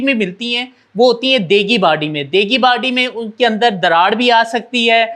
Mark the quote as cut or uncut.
uncut